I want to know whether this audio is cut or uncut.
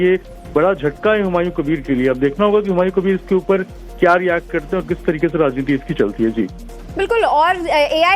cut